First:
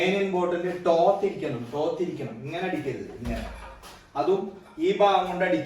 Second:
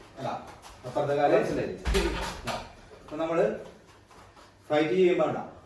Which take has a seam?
second; 1 cut; at 1.5 s

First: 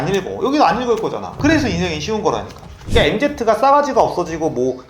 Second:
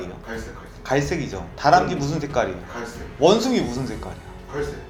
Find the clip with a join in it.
first; 1 cut; at 2.7 s

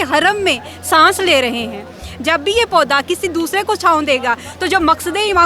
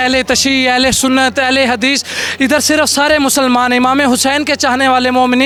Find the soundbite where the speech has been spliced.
first; 1 cut; at 2.0 s

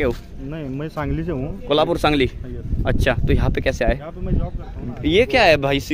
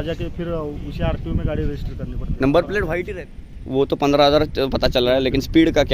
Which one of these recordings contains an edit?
second; 1 cut; at 3.1 s

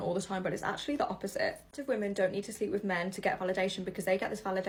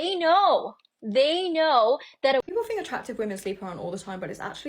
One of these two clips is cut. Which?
second; 1 cut; at 2.4 s

